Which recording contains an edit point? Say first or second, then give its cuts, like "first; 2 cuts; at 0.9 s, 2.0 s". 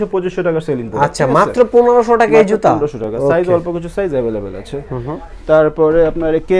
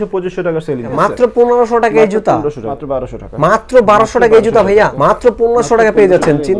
second; 3 cuts; at 0.9 s, 2.7 s, 4.9 s